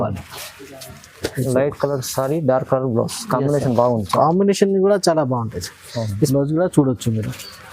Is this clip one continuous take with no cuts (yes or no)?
no